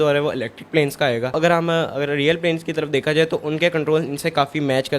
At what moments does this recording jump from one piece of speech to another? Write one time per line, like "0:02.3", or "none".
0:01.4

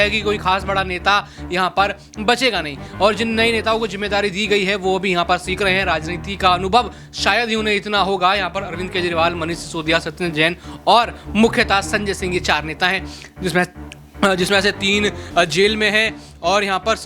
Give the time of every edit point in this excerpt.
none

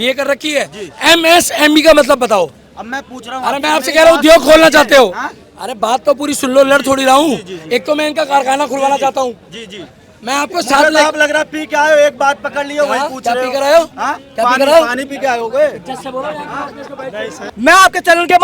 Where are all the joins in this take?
0:17.4

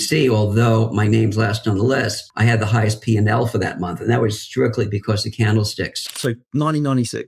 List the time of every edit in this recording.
0:02.2
0:05.0
0:06.0

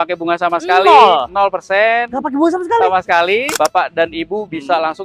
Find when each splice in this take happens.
0:03.5

